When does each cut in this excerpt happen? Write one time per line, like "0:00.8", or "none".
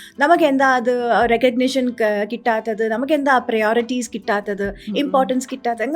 none